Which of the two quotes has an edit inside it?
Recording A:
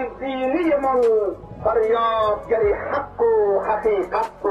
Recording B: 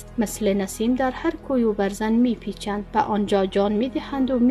A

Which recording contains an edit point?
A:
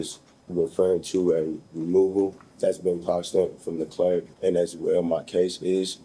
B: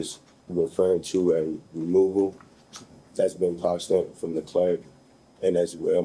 A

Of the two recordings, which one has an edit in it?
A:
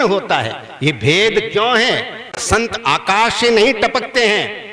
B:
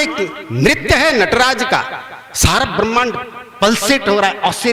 A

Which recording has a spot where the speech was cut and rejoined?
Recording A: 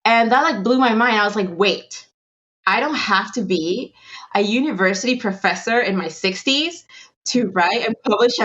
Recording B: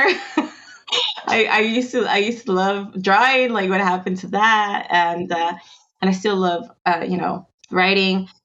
B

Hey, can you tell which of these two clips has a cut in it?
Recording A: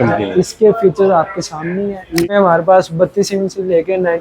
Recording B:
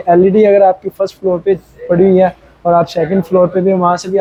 A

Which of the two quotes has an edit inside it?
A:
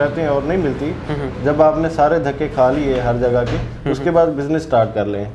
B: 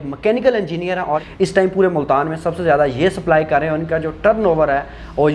B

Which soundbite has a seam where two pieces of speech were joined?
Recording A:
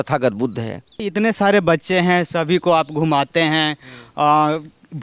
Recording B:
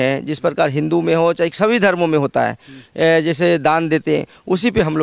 A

